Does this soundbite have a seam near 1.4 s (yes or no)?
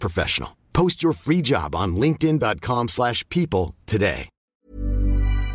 no